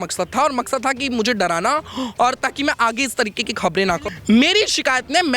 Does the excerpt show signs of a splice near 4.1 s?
yes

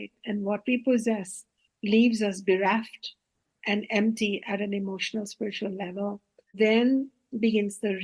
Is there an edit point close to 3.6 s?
no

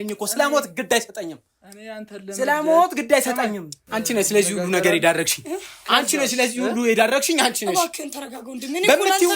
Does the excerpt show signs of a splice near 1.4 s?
no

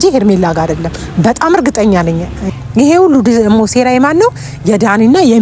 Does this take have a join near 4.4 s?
no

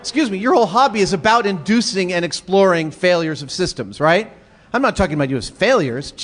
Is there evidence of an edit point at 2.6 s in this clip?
yes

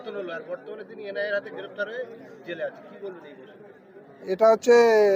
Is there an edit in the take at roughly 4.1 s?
yes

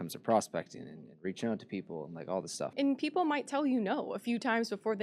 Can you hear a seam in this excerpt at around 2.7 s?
yes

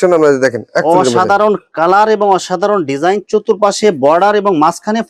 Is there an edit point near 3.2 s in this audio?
no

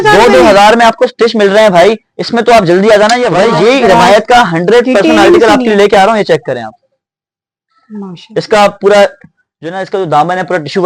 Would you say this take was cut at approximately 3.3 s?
yes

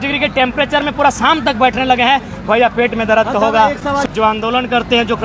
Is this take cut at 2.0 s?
no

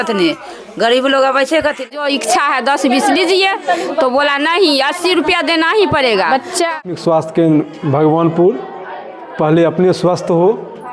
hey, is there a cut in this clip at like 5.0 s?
no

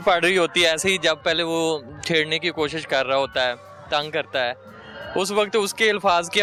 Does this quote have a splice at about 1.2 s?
no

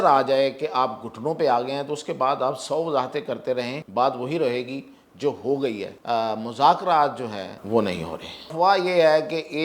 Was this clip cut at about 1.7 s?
no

